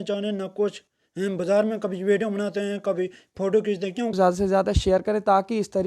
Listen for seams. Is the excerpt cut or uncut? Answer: cut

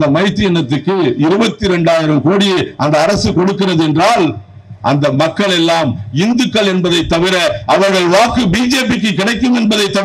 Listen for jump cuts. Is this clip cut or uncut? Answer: uncut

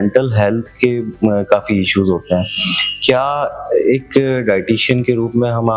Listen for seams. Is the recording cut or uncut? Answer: uncut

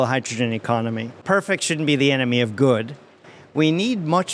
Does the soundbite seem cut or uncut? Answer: cut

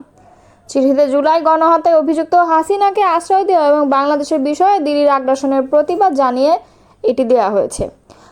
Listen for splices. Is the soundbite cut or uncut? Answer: uncut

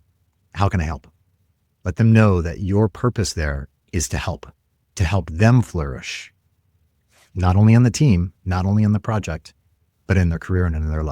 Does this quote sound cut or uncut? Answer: uncut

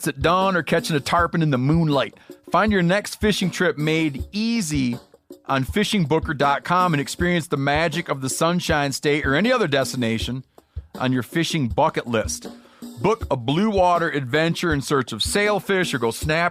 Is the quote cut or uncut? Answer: uncut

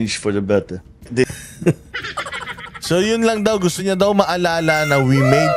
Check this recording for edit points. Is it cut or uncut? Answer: cut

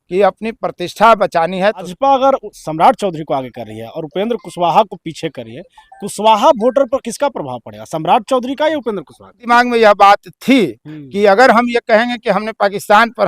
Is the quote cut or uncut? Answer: cut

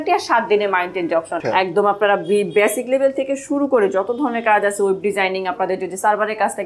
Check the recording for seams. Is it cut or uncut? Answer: cut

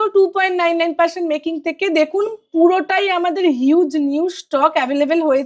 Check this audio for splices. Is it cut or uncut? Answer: uncut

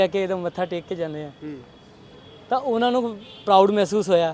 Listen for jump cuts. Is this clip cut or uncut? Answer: uncut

